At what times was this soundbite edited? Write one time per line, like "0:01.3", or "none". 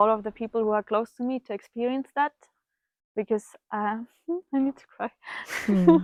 none